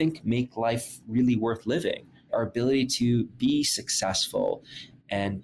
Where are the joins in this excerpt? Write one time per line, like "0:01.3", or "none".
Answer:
0:02.2
0:03.3